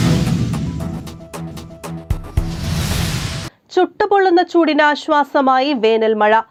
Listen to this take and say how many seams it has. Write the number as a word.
zero